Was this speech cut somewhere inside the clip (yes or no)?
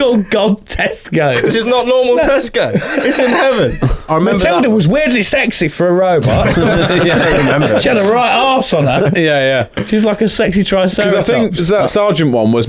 yes